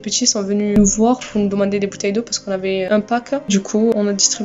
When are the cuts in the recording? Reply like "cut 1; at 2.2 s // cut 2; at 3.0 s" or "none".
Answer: cut 1; at 0.8 s // cut 2; at 2.9 s

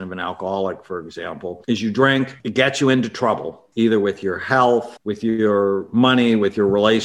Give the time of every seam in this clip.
cut 1; at 1.6 s // cut 2; at 2.4 s // cut 3; at 3.6 s // cut 4; at 5.0 s

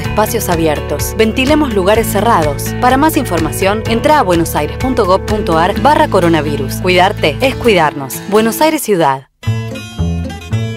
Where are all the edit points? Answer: cut 1; at 9.3 s

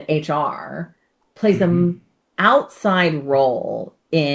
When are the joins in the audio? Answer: none

